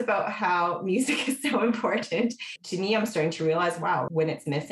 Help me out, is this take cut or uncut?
cut